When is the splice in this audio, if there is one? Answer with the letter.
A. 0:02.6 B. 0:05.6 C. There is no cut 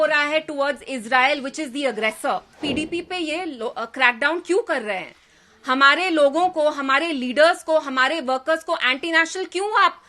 A